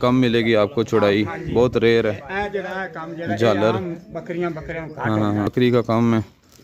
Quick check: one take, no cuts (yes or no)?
no